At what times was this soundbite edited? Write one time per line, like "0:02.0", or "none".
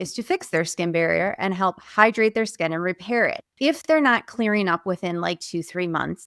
0:03.5